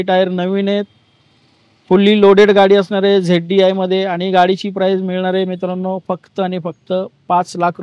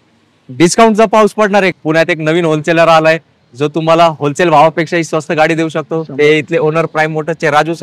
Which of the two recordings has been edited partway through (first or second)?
second